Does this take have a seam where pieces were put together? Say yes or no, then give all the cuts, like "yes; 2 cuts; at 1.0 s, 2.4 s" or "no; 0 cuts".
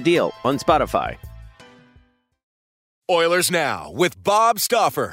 yes; 1 cut; at 2.8 s